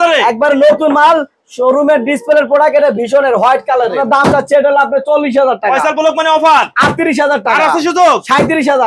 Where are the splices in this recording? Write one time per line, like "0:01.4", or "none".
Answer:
0:04.1